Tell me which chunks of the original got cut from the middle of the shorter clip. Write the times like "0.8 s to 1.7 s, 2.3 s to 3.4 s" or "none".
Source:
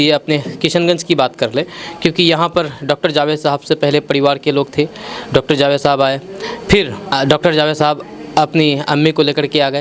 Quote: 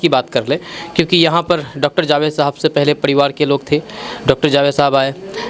none